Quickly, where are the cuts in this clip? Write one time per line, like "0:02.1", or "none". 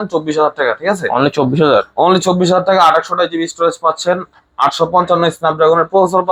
none